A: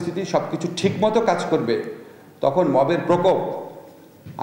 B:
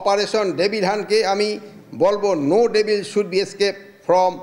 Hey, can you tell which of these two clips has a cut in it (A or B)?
A